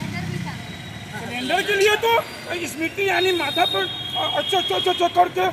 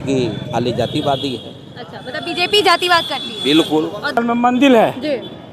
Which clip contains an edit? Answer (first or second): second